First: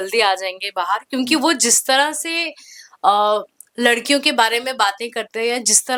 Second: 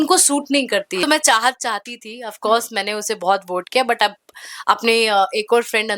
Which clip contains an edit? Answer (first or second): second